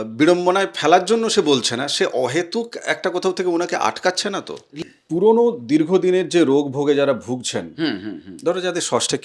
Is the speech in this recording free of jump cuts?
no; 1 cut; at 4.6 s

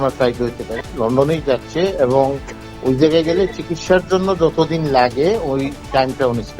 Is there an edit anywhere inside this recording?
yes; 1 cut; at 0.9 s

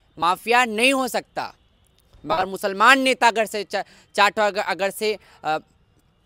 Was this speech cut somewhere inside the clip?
no; 0 cuts

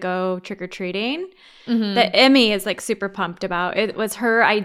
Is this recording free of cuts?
yes; 0 cuts

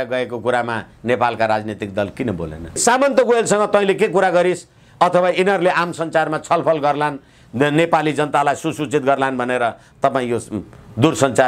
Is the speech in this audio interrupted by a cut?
yes; 1 cut; at 2.8 s

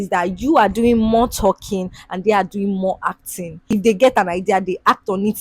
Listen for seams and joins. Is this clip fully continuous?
no; 1 cut; at 3.7 s

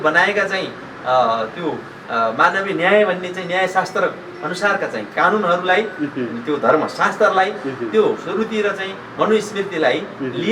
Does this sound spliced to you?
no; 0 cuts

